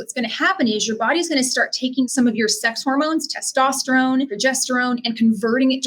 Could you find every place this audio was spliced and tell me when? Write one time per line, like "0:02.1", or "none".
0:02.0
0:04.3